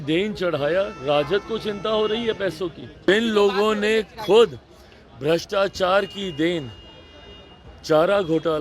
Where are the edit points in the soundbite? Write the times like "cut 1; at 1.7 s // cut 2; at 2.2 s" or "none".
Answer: cut 1; at 3.1 s